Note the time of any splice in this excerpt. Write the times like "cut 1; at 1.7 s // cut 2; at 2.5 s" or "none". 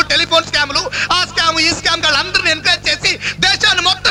none

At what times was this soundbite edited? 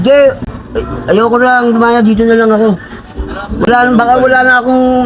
none

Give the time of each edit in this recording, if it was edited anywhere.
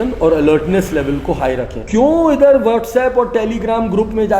cut 1; at 1.8 s

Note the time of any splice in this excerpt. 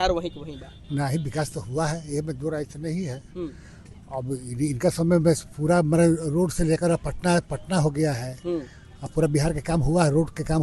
none

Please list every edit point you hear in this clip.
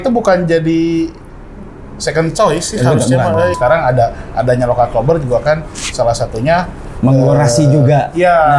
cut 1; at 3.6 s

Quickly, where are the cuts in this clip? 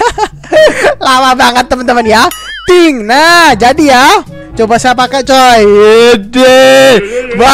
cut 1; at 4.4 s

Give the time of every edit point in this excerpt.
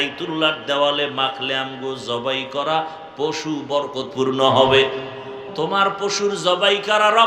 cut 1; at 5.4 s

